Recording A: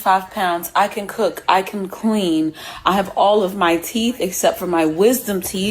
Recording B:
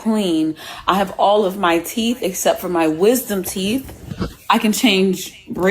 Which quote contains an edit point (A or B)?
B